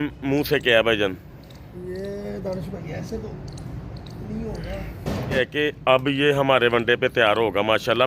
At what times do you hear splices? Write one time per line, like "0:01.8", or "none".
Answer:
0:05.4